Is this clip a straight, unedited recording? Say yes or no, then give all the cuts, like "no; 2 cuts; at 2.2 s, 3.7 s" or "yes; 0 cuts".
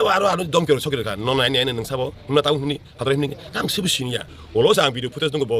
no; 1 cut; at 4.3 s